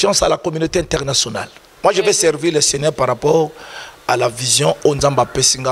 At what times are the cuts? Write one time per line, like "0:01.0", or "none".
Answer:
0:01.6